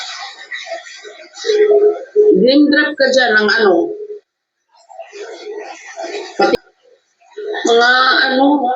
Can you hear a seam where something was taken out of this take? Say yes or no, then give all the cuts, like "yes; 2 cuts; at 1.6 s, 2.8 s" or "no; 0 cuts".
yes; 1 cut; at 6.5 s